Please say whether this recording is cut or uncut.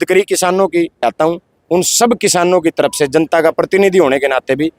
cut